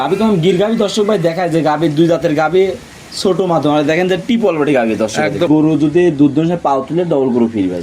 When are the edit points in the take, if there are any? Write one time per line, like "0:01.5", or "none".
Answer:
0:05.5